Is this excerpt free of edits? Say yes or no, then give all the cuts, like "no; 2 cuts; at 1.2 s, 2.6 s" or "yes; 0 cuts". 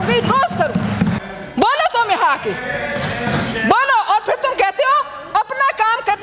no; 1 cut; at 1.2 s